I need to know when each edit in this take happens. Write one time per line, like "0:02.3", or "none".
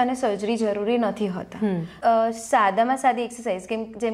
0:01.9